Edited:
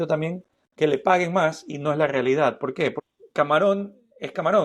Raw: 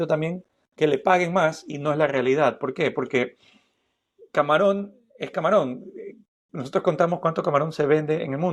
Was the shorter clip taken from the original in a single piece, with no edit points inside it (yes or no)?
no